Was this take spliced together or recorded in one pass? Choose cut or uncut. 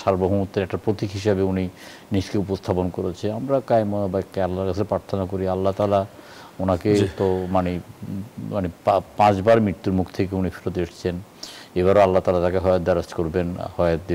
uncut